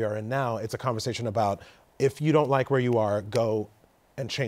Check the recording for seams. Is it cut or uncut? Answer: uncut